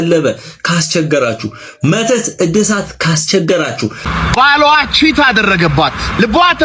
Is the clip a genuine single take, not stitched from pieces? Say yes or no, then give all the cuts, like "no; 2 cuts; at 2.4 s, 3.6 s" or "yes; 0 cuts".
no; 1 cut; at 4.0 s